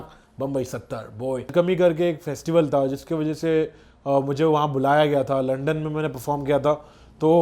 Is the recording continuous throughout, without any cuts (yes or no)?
no